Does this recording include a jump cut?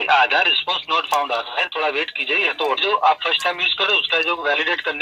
yes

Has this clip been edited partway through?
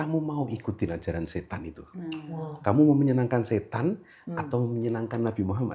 no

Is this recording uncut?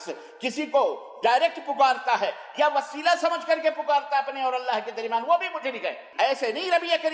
no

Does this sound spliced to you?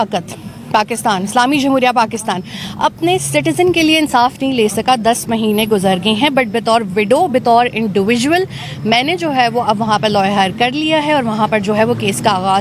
no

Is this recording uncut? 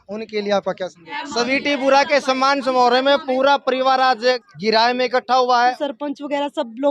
no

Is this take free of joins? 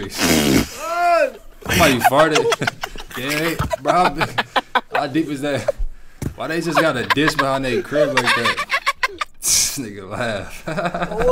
yes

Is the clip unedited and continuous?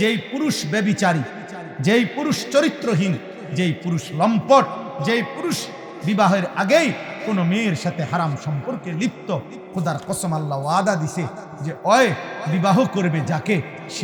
yes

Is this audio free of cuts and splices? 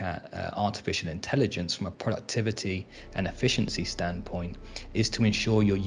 no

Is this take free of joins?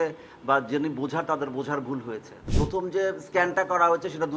no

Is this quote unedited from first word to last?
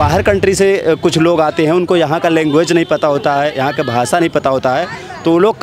yes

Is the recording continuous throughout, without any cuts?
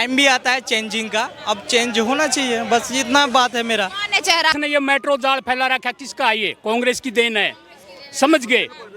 no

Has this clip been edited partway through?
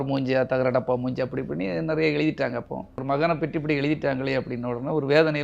yes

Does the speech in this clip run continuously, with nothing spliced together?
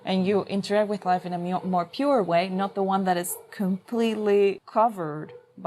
no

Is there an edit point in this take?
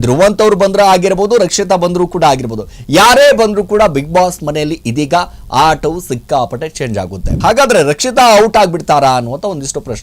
yes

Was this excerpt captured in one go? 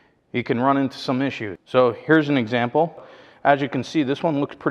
no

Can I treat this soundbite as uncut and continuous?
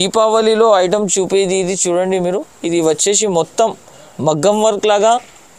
yes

